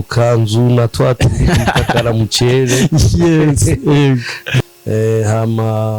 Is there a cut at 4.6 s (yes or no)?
yes